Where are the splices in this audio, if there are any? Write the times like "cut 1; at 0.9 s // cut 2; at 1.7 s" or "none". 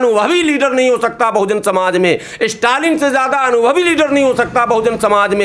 none